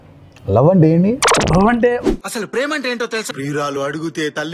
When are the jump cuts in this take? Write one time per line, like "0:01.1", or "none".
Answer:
0:02.1